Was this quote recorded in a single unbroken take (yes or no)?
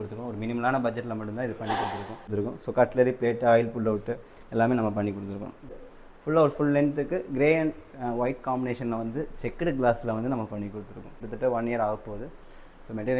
no